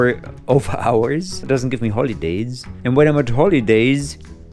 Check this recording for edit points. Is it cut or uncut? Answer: cut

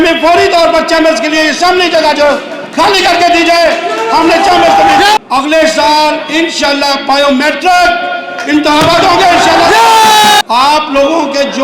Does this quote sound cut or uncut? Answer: cut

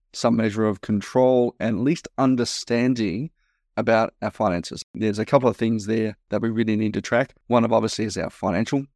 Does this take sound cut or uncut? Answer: cut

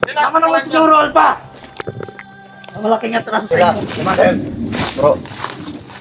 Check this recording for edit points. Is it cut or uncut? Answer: cut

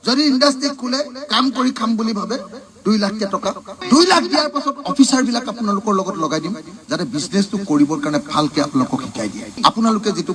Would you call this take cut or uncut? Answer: uncut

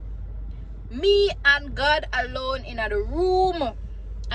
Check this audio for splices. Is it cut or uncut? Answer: uncut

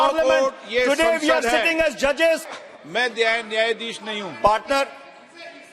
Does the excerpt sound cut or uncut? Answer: cut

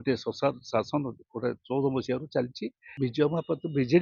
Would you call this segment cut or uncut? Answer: cut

